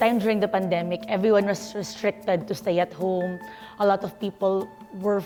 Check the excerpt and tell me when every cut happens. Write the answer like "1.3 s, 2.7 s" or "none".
none